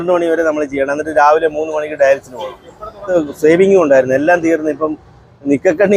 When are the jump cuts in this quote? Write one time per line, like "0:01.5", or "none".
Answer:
0:03.1